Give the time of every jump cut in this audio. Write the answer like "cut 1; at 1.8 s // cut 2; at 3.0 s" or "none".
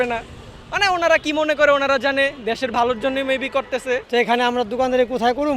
cut 1; at 4.0 s